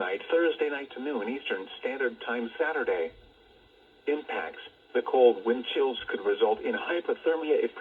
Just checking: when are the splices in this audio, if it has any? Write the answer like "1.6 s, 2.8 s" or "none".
6.0 s